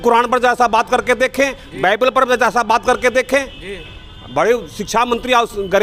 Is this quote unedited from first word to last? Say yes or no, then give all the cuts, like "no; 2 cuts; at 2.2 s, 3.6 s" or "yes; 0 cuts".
yes; 0 cuts